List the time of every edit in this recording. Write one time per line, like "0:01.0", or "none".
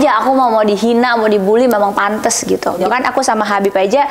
0:02.8

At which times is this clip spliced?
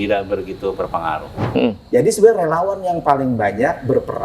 0:01.4

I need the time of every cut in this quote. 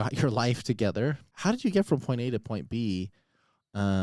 0:01.3

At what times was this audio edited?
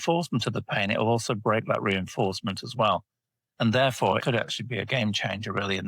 0:04.2

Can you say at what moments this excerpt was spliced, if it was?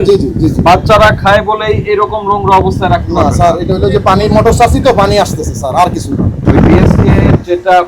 0:06.5

